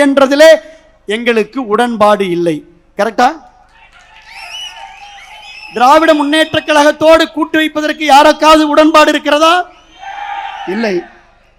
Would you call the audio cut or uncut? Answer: uncut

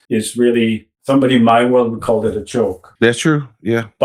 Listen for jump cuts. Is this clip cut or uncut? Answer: cut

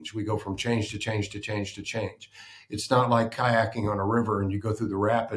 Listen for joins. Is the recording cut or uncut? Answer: uncut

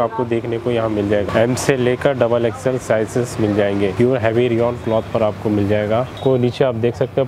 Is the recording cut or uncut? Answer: cut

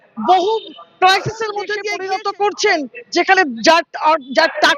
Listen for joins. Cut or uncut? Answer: cut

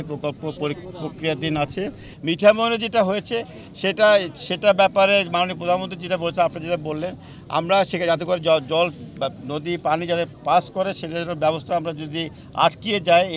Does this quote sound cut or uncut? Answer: cut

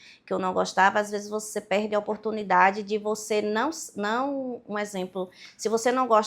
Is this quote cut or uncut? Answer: uncut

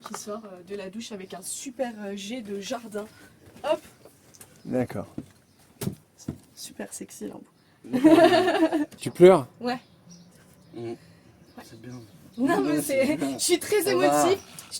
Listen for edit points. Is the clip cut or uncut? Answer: cut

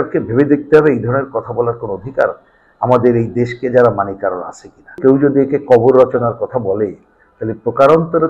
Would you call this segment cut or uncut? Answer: cut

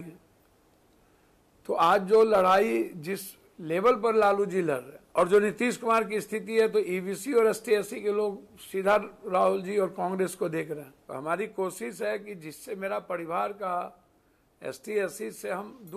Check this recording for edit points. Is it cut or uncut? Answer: cut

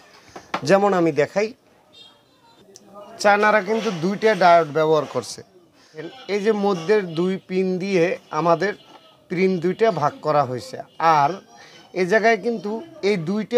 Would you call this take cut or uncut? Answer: cut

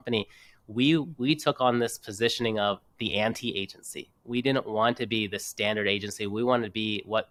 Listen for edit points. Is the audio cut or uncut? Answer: uncut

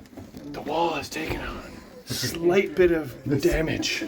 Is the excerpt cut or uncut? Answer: uncut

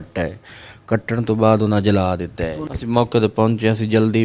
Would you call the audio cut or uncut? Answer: cut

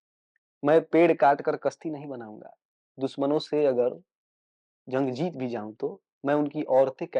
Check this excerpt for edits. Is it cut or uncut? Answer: uncut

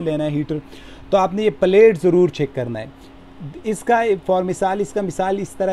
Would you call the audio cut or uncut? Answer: uncut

